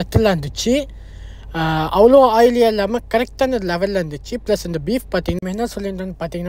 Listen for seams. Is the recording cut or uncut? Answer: cut